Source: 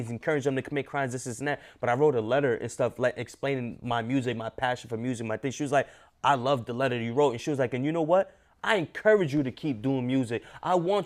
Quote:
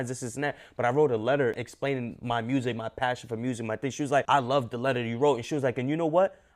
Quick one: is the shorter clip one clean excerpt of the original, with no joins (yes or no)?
no